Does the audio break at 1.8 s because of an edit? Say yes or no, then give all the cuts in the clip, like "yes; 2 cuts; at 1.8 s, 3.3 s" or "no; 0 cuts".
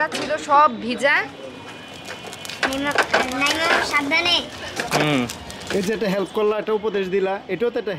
yes; 1 cut; at 1.8 s